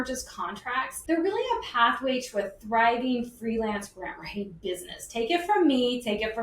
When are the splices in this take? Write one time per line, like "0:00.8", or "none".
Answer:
0:01.0